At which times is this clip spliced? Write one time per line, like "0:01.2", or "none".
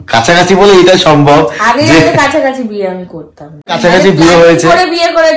0:03.8